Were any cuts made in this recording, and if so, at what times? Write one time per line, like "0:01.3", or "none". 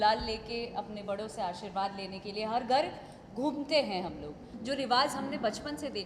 0:04.5